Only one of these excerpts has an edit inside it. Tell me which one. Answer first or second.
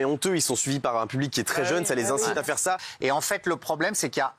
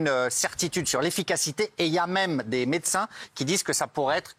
first